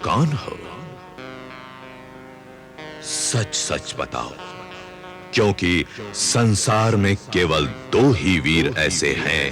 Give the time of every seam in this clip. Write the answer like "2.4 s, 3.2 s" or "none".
1.2 s